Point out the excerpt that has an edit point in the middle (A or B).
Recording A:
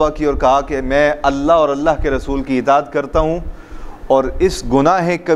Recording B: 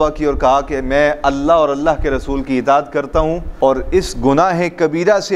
B